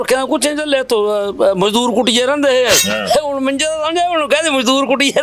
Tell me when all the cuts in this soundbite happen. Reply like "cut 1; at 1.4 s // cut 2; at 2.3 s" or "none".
cut 1; at 2.9 s